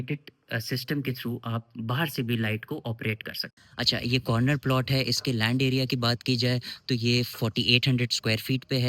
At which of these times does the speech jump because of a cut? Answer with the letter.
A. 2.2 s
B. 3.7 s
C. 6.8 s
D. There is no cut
B